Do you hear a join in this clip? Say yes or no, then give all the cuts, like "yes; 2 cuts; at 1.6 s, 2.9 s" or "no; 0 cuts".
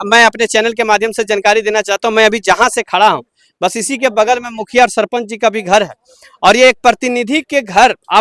no; 0 cuts